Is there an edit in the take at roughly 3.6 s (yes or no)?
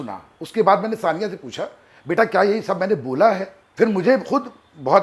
yes